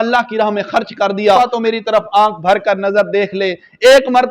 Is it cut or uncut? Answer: cut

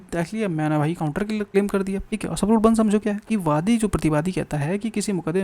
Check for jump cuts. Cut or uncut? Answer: cut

